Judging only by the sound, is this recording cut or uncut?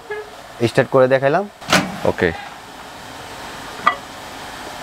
cut